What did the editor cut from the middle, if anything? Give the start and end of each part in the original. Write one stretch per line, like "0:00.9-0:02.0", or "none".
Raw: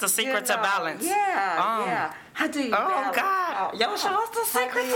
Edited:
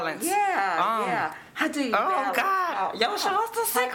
none